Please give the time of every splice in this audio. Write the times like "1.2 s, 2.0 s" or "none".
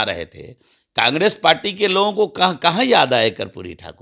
none